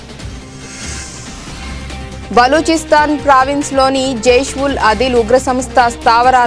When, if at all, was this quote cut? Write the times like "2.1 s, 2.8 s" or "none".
1.5 s